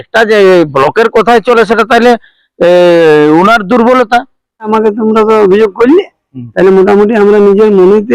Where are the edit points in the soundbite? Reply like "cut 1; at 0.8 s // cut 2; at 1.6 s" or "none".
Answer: cut 1; at 4.7 s